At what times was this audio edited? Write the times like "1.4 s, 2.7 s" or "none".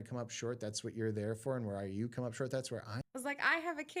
2.9 s